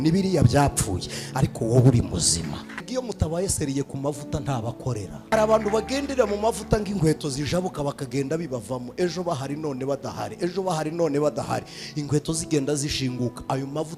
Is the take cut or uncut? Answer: cut